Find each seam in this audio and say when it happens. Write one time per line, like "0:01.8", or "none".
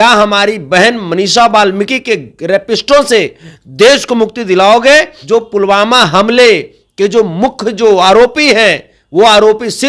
0:05.2